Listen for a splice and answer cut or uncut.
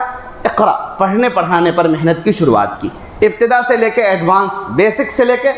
uncut